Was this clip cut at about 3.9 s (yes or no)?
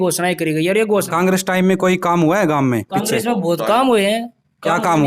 no